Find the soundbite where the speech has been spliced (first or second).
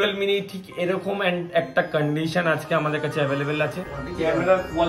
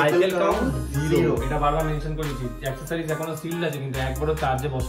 first